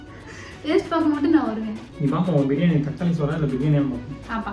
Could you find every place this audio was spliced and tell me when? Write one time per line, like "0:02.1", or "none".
0:01.9